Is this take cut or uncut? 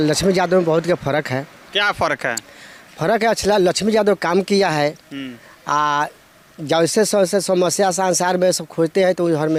uncut